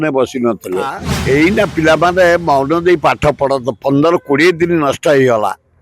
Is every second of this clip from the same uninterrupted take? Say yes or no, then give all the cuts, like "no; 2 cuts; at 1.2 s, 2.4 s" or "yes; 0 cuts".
no; 1 cut; at 1.1 s